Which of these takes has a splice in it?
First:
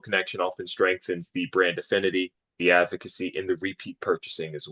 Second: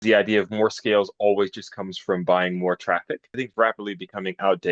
second; 1 cut; at 3.5 s

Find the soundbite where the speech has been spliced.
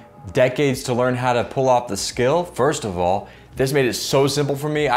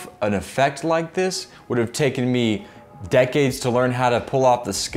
first; 1 cut; at 3.4 s

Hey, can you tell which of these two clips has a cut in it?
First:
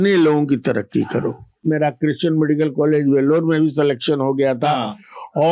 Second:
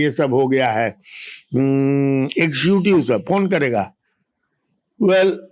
first; 1 cut; at 1.7 s

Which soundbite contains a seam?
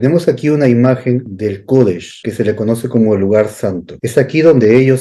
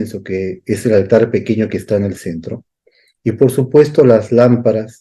first; 3 cuts; at 1.3 s, 2.1 s, 3.9 s

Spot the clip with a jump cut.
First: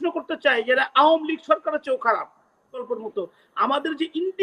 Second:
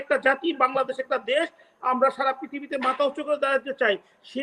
first; 1 cut; at 2.8 s

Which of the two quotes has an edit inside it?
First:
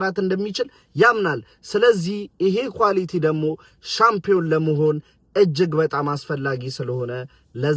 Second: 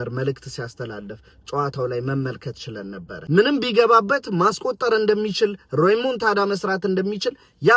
second; 1 cut; at 3.1 s

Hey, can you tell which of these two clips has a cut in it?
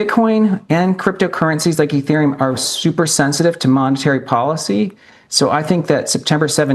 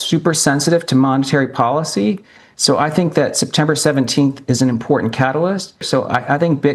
second; 1 cut; at 5.8 s

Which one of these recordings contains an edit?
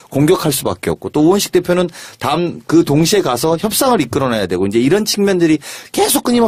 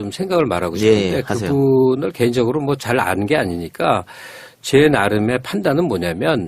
second; 1 cut; at 2.6 s

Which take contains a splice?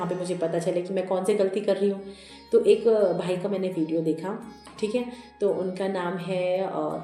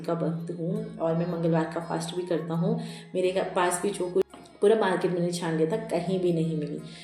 second; 1 cut; at 4.3 s

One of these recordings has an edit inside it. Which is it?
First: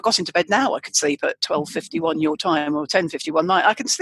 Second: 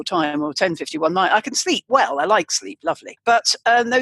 second; 1 cut; at 3.1 s

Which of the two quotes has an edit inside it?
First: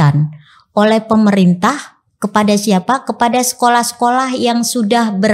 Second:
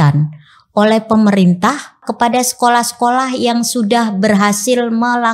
second; 1 cut; at 2.1 s

